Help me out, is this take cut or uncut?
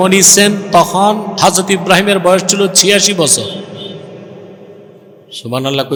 uncut